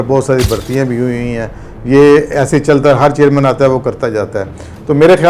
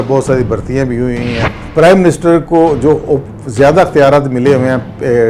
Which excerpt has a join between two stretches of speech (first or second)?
second